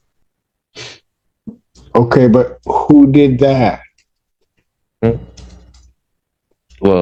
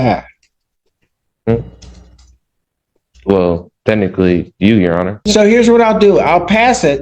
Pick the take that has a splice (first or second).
second